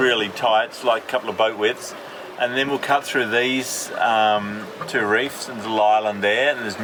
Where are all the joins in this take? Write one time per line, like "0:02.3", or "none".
none